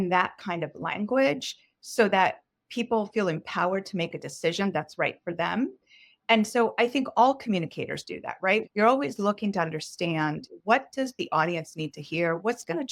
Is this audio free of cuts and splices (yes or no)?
no